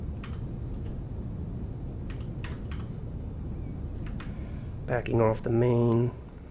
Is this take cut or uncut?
cut